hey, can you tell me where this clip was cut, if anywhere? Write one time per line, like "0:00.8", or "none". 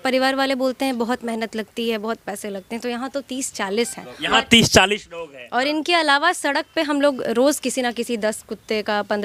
none